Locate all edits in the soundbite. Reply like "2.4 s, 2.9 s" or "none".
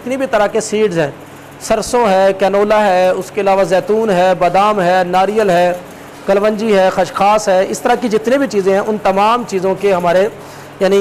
none